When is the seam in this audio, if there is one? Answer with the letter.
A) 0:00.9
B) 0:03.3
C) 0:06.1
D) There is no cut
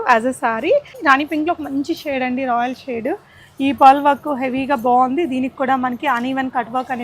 A